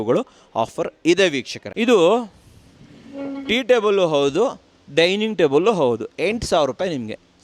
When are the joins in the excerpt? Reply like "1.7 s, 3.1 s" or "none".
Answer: 1.6 s